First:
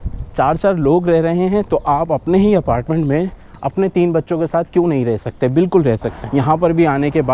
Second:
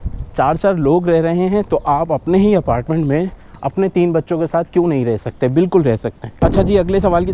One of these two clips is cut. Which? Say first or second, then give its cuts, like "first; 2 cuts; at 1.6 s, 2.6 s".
first; 1 cut; at 6.2 s